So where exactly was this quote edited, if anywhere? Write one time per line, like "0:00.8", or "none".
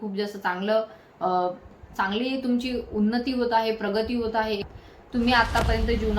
0:04.7